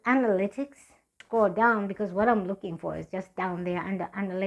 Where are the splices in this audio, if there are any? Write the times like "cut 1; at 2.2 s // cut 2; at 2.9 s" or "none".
cut 1; at 1.2 s